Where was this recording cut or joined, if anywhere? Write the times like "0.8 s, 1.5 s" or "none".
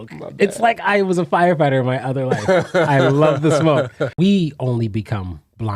4.0 s